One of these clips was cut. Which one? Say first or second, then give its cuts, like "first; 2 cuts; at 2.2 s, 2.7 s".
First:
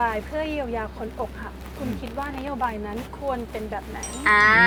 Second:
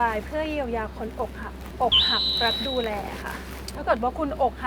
second; 1 cut; at 1.6 s